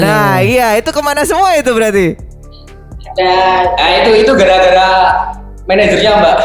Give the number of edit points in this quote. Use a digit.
0